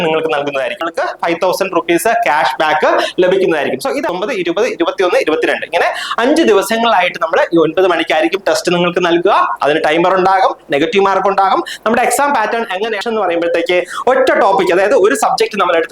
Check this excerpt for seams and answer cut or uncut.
cut